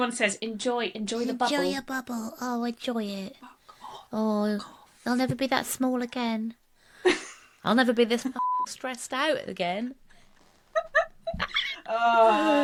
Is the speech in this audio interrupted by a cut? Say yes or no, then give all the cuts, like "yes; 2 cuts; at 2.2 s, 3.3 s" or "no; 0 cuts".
no; 0 cuts